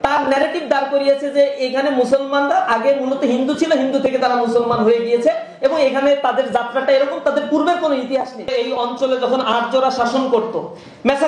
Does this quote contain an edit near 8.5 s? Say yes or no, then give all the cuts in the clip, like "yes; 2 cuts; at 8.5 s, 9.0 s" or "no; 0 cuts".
yes; 1 cut; at 8.5 s